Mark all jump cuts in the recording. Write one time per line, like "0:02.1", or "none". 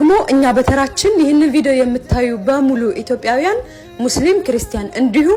none

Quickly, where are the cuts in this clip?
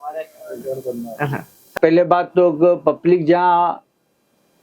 0:01.6

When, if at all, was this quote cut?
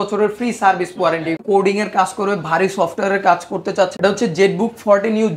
0:01.4
0:03.9

